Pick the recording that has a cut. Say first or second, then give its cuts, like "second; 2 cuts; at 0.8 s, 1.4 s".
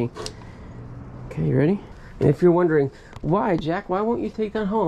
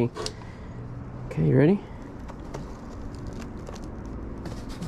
first; 1 cut; at 2.0 s